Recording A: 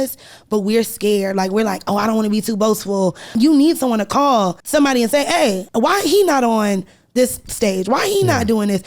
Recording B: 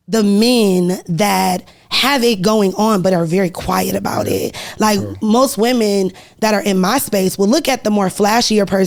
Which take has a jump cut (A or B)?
A